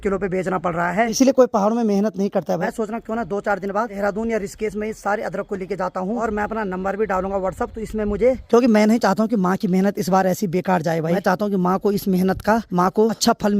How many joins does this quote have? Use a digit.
7